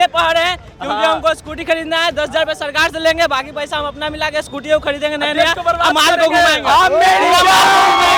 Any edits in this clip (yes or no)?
no